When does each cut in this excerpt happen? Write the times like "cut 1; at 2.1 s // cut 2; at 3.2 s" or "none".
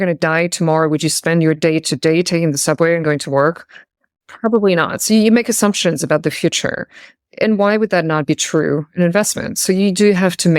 none